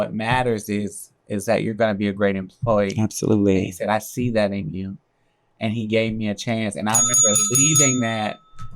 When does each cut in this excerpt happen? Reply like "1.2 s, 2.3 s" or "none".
none